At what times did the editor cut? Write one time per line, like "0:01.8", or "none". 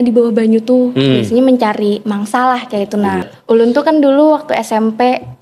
0:03.3